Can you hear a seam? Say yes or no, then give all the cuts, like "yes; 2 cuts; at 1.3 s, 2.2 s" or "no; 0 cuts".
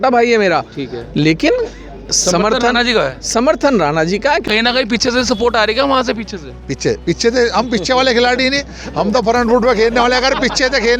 yes; 1 cut; at 4.4 s